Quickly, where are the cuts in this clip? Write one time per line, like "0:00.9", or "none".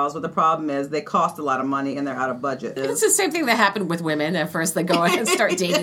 0:02.8